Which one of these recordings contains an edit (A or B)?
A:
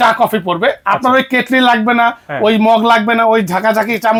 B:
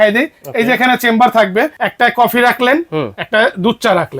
B